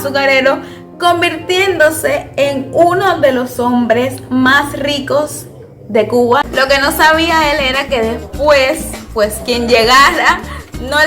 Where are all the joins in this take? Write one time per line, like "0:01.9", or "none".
0:06.5